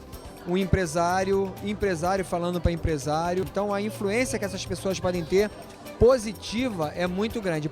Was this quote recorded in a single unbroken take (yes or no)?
no